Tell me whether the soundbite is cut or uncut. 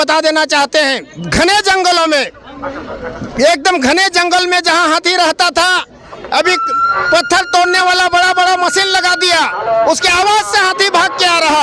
uncut